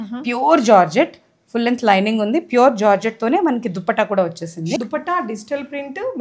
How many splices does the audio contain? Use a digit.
1